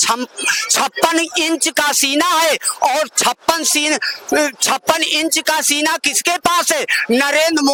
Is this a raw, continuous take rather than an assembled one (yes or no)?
yes